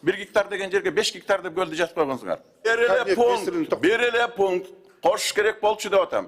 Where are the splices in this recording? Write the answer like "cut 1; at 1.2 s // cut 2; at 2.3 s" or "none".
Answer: cut 1; at 2.7 s